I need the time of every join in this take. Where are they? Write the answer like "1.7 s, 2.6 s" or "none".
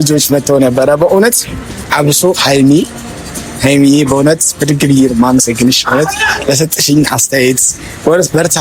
none